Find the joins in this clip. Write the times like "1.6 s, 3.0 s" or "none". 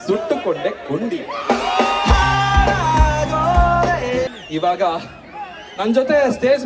4.3 s